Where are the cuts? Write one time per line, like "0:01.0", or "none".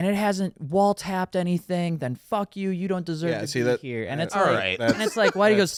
none